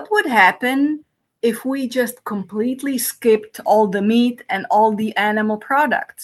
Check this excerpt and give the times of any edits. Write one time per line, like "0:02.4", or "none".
none